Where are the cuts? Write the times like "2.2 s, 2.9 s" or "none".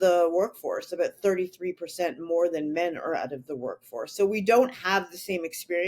none